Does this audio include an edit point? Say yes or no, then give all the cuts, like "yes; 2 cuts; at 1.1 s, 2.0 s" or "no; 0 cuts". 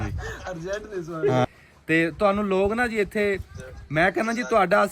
yes; 1 cut; at 1.4 s